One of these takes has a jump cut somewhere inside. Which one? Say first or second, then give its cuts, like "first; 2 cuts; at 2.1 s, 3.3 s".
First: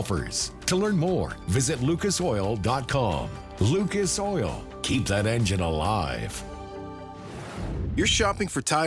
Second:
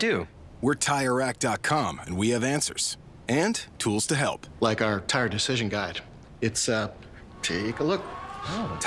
first; 1 cut; at 7.8 s